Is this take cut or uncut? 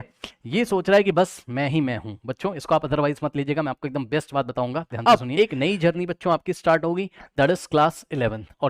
cut